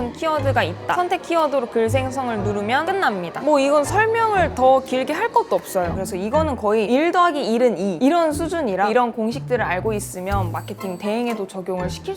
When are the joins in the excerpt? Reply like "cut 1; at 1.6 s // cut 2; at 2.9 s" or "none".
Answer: cut 1; at 1.0 s // cut 2; at 5.9 s